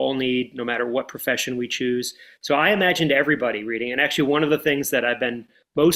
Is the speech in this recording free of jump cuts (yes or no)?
yes